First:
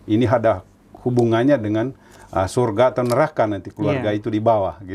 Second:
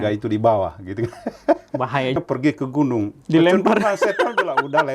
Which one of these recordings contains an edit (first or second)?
second